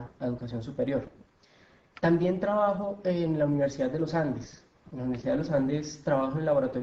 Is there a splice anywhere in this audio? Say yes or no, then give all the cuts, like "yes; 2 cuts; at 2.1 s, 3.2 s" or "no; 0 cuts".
yes; 1 cut; at 4.7 s